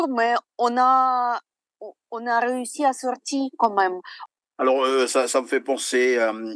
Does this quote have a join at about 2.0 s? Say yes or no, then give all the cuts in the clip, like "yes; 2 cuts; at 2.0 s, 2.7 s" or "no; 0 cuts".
no; 1 cut; at 4.1 s